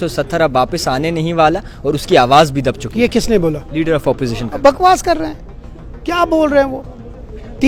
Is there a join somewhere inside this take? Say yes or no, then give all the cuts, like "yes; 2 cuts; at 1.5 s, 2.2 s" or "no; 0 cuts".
no; 0 cuts